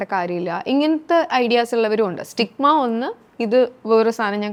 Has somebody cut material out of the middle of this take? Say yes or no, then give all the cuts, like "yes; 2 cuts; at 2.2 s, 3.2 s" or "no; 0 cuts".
no; 0 cuts